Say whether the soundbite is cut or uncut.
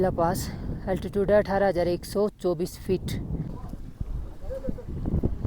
cut